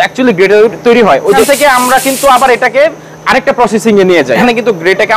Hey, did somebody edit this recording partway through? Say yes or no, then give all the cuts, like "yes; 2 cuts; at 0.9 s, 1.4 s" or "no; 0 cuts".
yes; 2 cuts; at 1.4 s, 4.4 s